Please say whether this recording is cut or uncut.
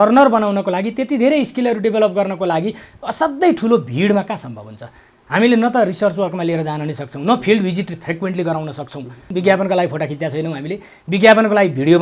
cut